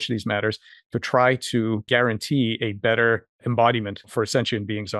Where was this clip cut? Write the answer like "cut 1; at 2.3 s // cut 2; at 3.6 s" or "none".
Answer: cut 1; at 1.8 s // cut 2; at 3.4 s // cut 3; at 4.1 s